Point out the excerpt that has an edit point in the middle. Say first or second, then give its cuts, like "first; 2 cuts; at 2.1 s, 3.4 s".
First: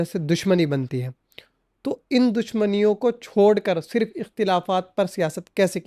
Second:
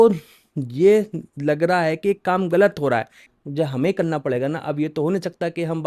second; 1 cut; at 3.2 s